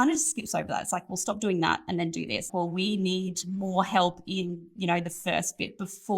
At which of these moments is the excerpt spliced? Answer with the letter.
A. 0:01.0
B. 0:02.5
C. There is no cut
B